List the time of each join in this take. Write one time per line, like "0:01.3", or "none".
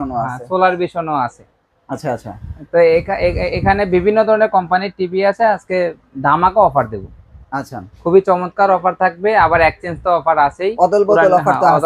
none